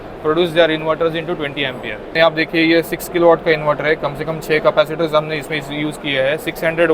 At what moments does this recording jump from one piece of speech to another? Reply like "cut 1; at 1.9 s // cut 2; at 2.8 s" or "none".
cut 1; at 2.1 s